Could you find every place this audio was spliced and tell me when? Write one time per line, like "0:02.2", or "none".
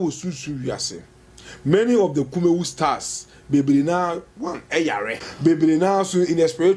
0:05.2